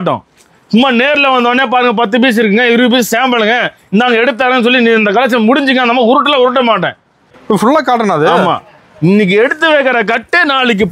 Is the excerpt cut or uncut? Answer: cut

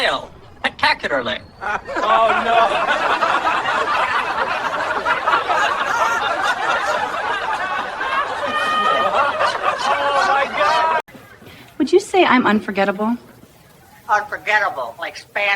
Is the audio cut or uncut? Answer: cut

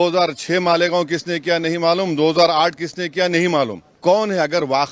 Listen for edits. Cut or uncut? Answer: cut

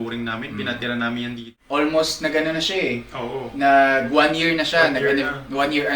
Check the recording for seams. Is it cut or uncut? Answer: cut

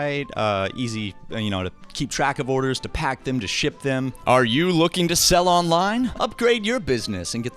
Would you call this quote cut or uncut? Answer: cut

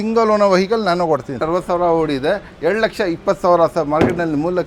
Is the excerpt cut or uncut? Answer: cut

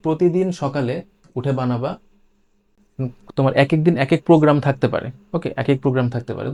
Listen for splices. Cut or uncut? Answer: uncut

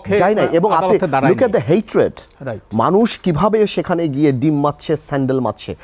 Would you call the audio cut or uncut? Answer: uncut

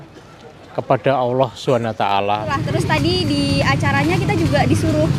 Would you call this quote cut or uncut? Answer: cut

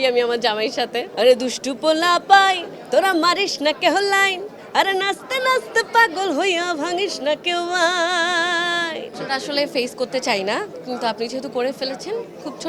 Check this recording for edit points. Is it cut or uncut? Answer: cut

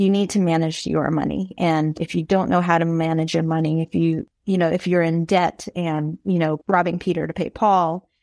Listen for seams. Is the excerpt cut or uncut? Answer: cut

